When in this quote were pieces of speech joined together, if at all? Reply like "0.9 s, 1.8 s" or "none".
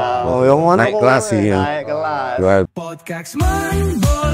2.7 s